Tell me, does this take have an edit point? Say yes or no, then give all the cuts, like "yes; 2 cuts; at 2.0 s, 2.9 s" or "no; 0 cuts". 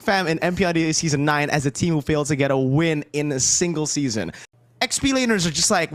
yes; 1 cut; at 4.4 s